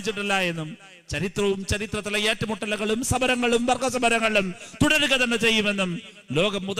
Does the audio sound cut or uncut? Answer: uncut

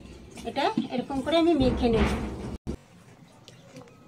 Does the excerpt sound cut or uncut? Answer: cut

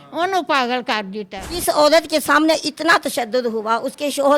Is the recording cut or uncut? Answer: cut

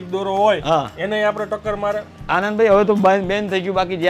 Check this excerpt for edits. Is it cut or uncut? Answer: uncut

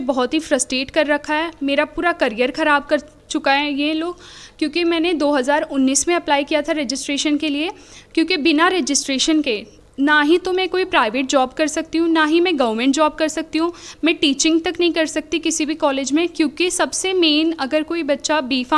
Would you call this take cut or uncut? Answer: uncut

